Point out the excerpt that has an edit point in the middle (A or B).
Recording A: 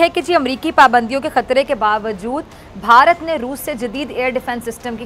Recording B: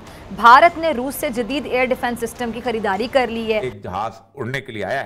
B